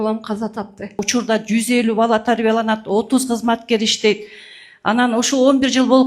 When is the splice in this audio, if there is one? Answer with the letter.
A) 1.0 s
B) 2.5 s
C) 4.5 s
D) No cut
A